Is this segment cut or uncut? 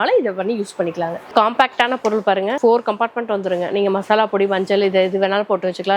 cut